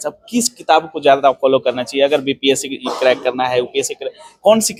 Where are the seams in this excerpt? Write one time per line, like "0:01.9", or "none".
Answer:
none